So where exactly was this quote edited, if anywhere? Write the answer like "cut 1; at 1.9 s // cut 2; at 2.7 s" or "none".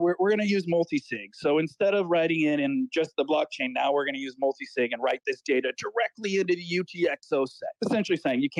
cut 1; at 7.6 s